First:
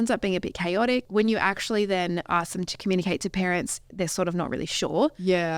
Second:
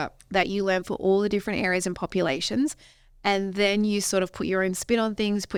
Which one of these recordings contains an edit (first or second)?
first